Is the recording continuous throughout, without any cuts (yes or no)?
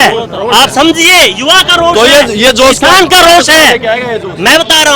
yes